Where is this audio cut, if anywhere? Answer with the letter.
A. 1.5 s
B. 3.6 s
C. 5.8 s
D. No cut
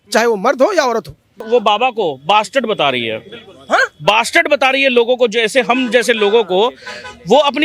A